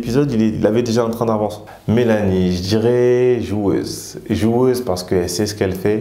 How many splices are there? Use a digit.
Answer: 1